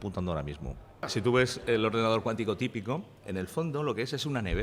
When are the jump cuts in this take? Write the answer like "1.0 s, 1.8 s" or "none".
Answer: 1.1 s